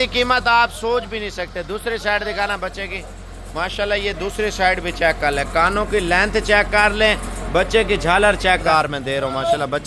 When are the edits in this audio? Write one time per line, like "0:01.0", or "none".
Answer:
0:08.6